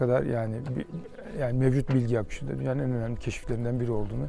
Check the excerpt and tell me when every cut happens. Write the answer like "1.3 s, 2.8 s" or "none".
none